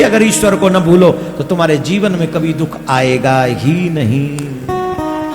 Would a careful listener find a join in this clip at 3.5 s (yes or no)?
no